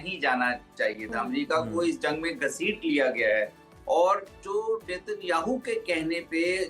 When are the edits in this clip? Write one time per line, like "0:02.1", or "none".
none